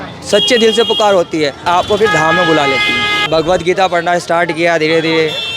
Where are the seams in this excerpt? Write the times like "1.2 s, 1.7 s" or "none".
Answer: 1.7 s, 3.3 s